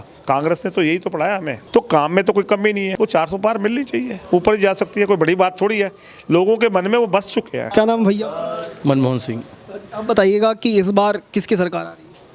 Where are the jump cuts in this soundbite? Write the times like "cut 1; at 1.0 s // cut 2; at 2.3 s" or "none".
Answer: cut 1; at 1.5 s // cut 2; at 2.9 s // cut 3; at 7.6 s